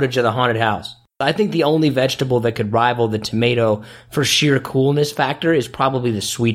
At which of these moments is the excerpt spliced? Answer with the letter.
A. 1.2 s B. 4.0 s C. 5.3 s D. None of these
A